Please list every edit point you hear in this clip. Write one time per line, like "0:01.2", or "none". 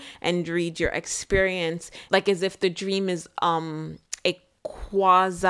0:01.9